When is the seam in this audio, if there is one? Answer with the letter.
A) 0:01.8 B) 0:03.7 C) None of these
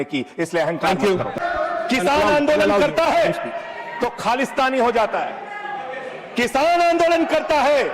A